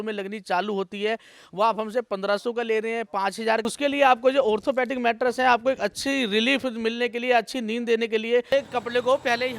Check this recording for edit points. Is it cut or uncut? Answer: cut